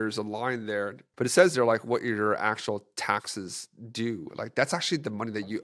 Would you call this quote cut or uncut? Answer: uncut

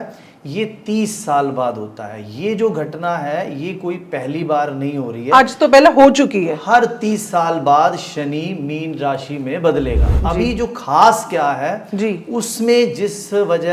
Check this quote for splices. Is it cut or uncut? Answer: cut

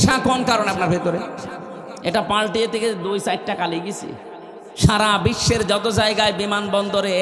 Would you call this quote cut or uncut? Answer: uncut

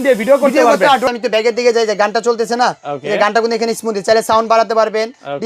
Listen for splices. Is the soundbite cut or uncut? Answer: cut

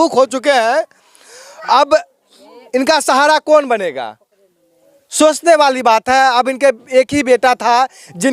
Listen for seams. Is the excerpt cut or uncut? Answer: uncut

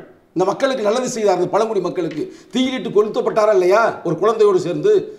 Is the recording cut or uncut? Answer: uncut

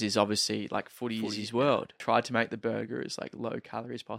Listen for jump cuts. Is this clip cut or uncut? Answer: cut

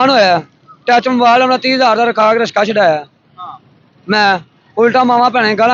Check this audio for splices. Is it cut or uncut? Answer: uncut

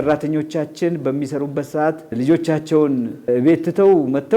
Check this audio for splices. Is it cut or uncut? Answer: cut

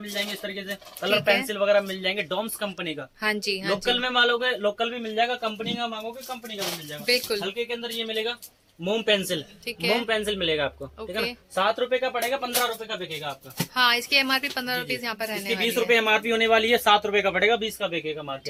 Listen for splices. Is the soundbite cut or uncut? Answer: uncut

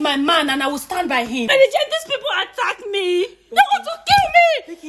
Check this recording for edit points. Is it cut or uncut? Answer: cut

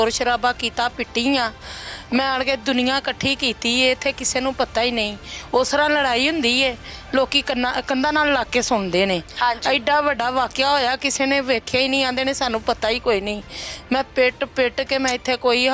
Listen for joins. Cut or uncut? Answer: uncut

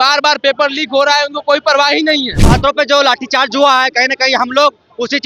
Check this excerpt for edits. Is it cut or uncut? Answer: cut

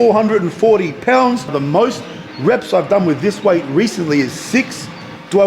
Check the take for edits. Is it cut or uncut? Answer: cut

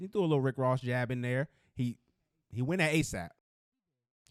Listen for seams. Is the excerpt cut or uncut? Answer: uncut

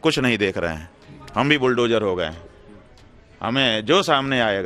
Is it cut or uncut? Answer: uncut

